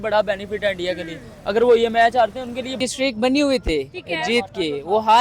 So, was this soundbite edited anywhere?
yes; 1 cut; at 2.8 s

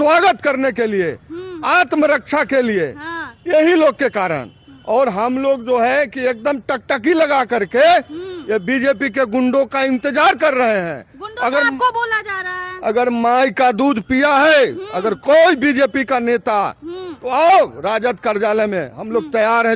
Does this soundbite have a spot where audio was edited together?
no; 0 cuts

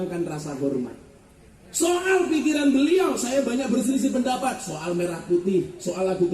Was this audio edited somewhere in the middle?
no; 0 cuts

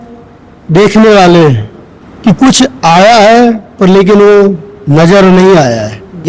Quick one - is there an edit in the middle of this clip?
no; 0 cuts

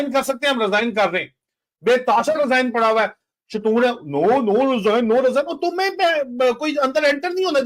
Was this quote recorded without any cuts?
yes; 0 cuts

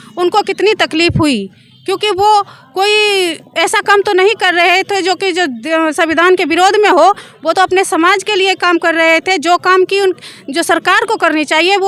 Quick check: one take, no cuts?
yes; 0 cuts

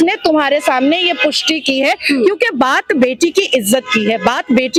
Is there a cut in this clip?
no; 0 cuts

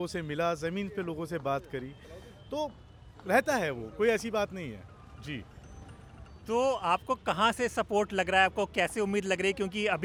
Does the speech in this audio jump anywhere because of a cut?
no; 0 cuts

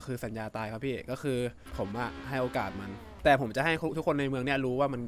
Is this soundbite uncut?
no; 2 cuts; at 1.6 s, 3.0 s

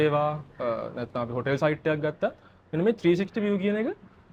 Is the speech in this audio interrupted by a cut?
no; 0 cuts

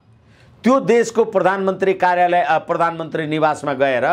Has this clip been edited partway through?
no; 0 cuts

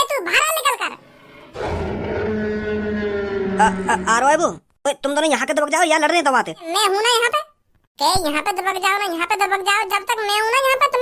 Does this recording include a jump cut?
yes; 1 cut; at 6.6 s

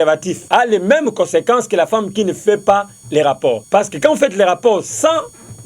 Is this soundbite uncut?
yes; 0 cuts

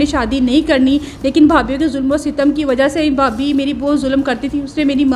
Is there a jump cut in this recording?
no; 0 cuts

